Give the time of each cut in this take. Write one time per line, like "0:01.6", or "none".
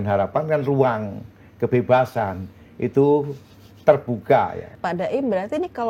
0:04.7